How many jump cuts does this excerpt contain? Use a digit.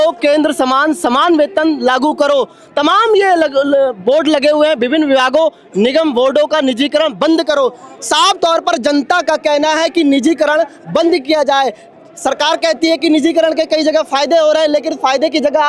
0